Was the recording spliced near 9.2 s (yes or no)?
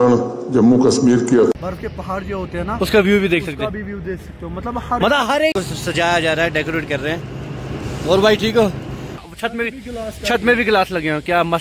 yes